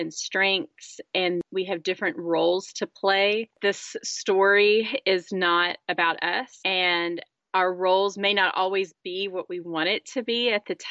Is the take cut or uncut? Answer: cut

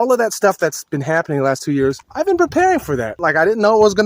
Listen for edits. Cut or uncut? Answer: cut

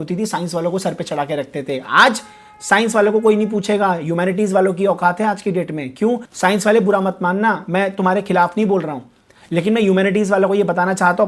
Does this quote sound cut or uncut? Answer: uncut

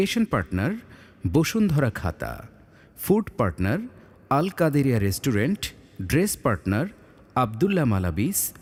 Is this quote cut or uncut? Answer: uncut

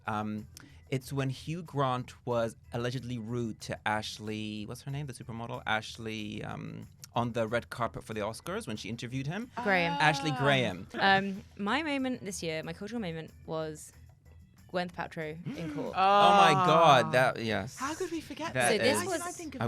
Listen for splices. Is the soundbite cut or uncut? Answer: cut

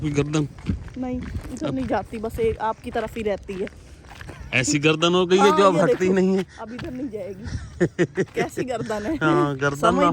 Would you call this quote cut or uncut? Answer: uncut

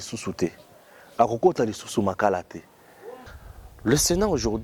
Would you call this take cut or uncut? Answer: cut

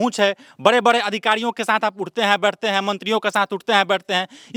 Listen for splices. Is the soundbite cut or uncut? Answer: uncut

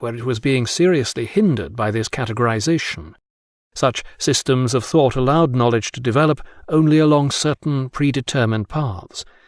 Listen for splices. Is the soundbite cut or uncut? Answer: uncut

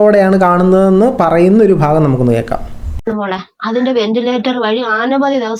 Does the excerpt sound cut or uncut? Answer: uncut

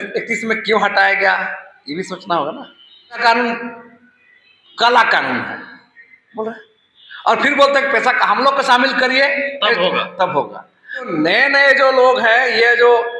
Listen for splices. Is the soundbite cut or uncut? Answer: cut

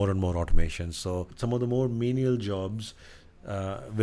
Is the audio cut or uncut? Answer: uncut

